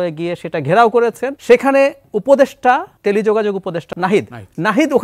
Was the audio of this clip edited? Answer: yes; 3 cuts; at 1.3 s, 2.9 s, 3.9 s

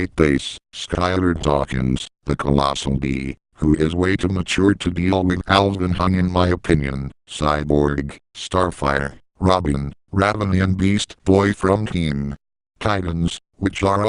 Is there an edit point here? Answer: no; 0 cuts

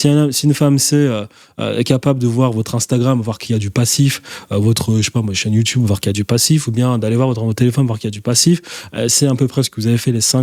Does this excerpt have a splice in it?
no; 0 cuts

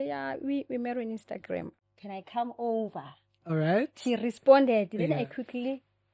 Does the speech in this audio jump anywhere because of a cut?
yes; 1 cut; at 1.8 s

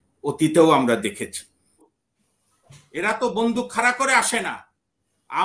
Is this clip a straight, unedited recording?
no; 1 cut; at 1.9 s

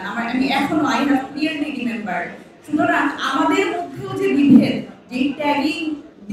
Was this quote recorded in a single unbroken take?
yes; 0 cuts

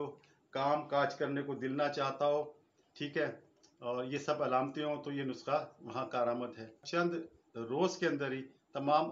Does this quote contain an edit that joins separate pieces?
yes; 1 cut; at 6.8 s

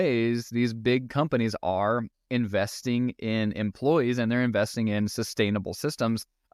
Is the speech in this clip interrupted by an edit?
no; 0 cuts

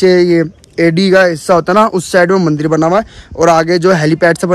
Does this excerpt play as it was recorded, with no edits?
yes; 0 cuts

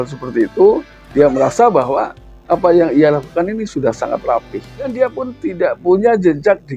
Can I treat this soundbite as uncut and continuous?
no; 1 cut; at 4.9 s

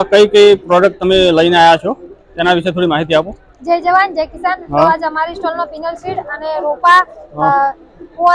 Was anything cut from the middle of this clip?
no; 0 cuts

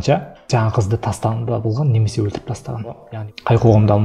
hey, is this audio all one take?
no; 1 cut; at 3.1 s

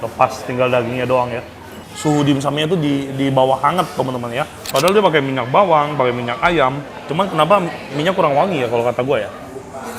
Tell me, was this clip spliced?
yes; 2 cuts; at 1.9 s, 4.6 s

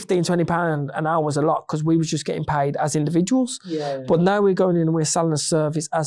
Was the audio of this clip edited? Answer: no; 0 cuts

